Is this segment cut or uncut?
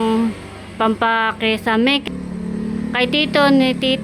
cut